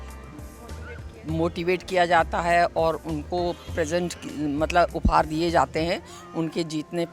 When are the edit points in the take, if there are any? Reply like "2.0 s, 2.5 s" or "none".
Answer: none